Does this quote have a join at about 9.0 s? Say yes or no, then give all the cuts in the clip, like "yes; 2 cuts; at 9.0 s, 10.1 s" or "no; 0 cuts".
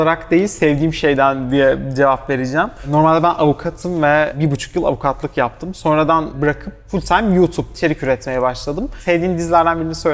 yes; 5 cuts; at 2.9 s, 4.4 s, 6.3 s, 7.8 s, 9.0 s